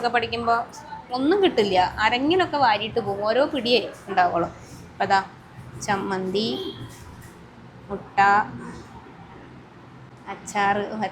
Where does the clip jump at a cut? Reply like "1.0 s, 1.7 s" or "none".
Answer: 10.1 s